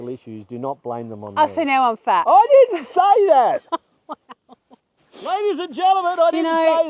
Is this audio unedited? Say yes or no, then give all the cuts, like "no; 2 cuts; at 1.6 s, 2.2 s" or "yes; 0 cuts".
yes; 0 cuts